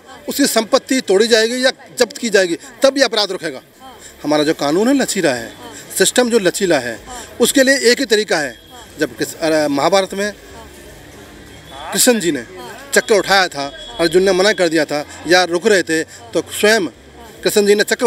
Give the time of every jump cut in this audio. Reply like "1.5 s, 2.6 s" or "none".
none

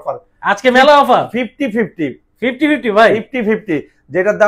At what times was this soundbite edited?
none

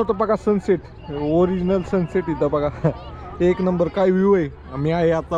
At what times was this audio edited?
none

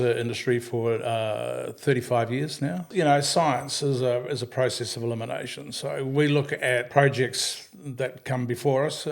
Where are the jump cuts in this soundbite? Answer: 2.9 s, 6.9 s

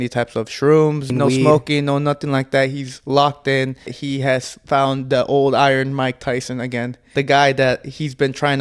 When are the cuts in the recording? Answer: 1.1 s, 4.0 s, 7.0 s

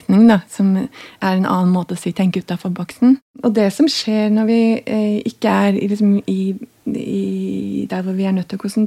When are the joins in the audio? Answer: 3.2 s

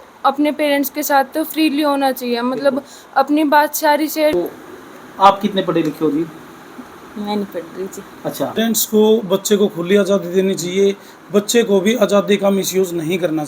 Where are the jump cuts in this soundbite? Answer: 4.3 s, 8.6 s

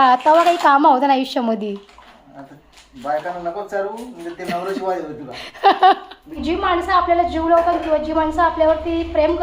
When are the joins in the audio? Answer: 6.3 s

